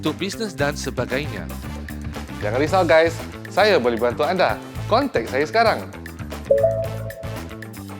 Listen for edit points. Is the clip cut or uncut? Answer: cut